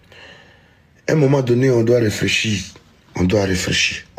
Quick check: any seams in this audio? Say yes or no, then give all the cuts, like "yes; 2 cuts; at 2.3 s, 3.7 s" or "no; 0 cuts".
no; 0 cuts